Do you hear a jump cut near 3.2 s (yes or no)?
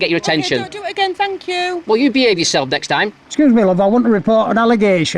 yes